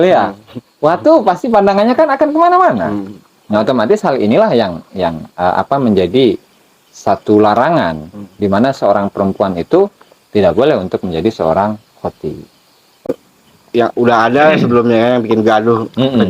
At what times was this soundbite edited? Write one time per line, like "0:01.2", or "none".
0:13.1